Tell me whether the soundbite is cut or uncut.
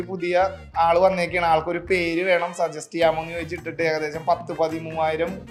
uncut